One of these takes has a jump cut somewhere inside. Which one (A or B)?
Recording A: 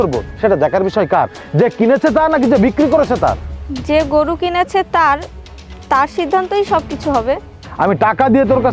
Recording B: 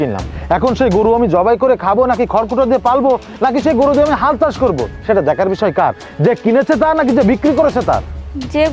A